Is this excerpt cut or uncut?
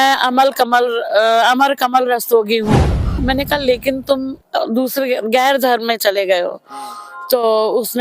cut